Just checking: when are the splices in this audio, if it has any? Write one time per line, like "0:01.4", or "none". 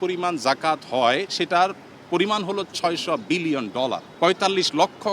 0:04.0